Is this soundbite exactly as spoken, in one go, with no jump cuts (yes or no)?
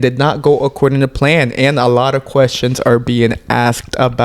yes